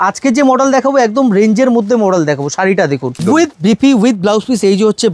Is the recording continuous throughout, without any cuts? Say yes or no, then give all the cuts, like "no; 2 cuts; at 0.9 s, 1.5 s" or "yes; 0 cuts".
no; 1 cut; at 3.2 s